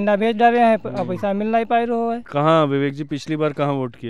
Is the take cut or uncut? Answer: cut